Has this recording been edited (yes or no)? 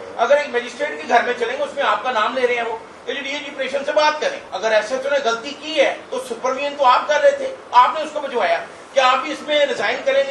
yes